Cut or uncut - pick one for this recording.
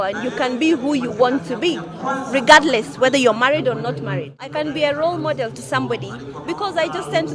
cut